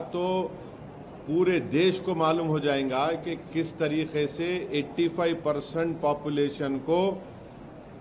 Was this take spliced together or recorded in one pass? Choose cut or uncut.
uncut